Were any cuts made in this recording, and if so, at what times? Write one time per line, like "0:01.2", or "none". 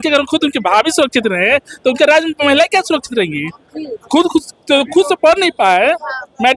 none